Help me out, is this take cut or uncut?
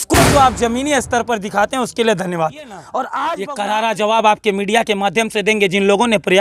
cut